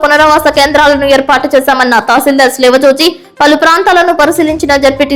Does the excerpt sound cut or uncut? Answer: uncut